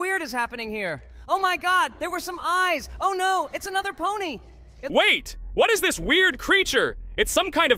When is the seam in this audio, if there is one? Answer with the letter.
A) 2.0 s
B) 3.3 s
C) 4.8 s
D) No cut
C